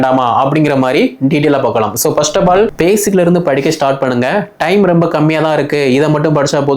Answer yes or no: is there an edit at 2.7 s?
yes